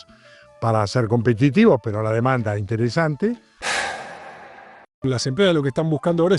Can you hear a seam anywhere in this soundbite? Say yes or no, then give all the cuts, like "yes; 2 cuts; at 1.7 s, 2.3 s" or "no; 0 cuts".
yes; 2 cuts; at 3.5 s, 5.0 s